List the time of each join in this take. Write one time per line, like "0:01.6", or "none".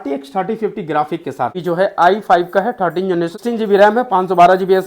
0:01.6
0:03.4